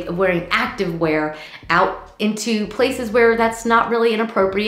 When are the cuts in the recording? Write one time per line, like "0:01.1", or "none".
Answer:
none